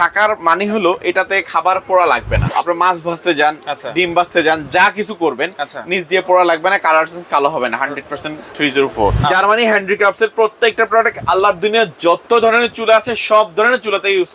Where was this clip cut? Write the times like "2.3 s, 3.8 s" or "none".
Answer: 2.5 s, 9.3 s